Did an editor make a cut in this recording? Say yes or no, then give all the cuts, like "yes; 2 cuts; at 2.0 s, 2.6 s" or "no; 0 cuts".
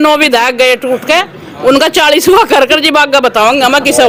no; 0 cuts